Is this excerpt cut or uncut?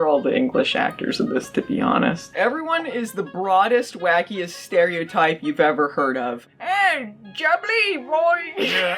cut